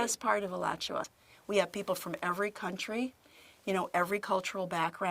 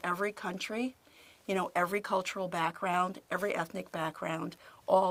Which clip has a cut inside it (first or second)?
first